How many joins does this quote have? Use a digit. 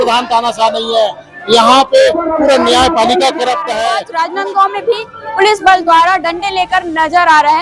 1